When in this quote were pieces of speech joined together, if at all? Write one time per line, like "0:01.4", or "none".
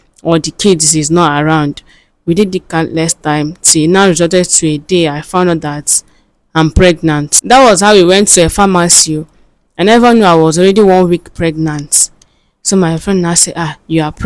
0:07.3